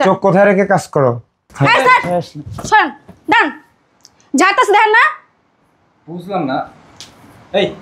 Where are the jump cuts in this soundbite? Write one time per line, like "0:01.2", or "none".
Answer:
0:01.5